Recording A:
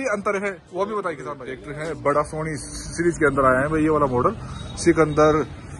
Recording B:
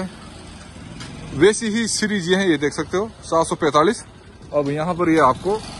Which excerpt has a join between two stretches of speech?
A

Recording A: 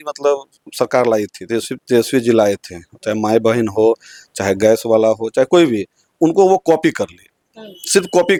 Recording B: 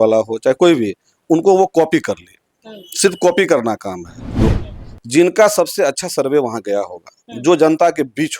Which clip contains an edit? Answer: B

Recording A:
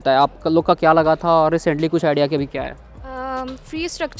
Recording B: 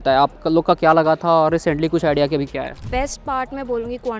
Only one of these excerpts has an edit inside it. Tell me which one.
B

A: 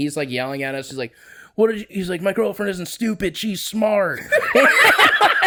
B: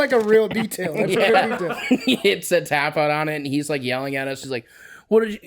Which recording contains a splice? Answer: B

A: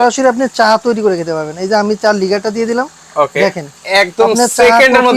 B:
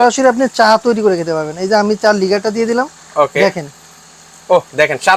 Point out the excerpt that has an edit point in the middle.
A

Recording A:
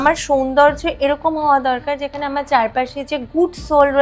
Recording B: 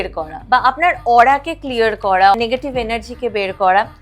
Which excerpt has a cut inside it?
B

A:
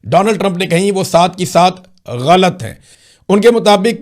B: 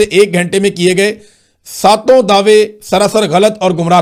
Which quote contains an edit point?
A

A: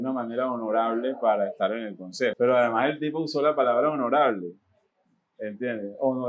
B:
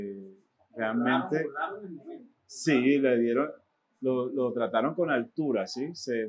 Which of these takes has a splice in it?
A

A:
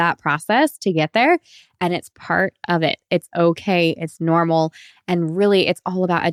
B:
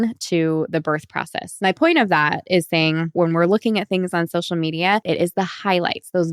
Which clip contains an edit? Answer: B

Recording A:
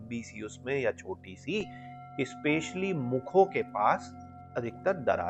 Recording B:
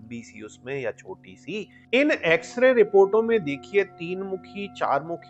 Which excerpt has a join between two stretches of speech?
B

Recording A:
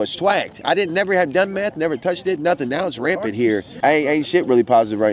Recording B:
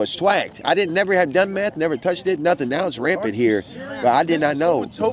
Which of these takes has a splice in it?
A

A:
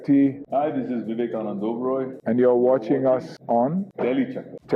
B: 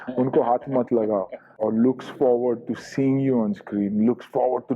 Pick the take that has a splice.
B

